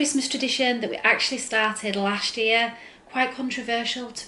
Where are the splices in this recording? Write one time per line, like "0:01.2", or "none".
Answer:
none